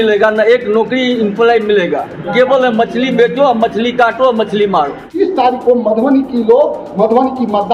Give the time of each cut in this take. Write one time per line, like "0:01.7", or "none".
0:05.2